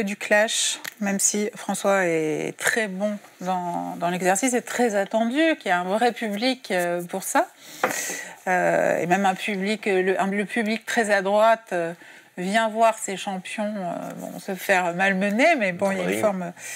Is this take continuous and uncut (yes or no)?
yes